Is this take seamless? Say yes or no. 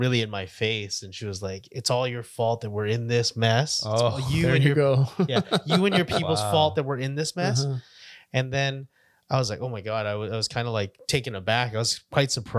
yes